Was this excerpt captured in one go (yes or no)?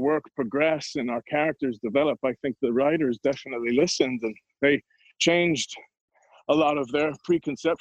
yes